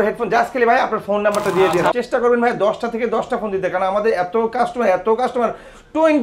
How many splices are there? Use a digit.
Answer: 1